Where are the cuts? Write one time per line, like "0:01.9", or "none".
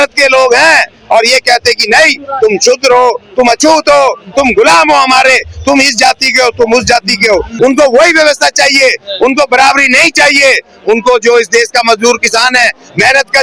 0:07.5